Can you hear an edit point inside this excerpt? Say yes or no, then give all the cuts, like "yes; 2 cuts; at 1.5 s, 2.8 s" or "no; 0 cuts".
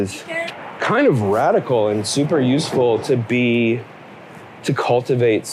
no; 0 cuts